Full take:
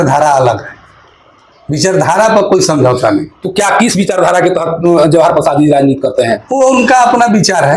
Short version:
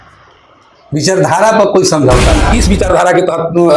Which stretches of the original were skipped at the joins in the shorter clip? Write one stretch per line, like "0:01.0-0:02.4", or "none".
0:03.3-0:03.8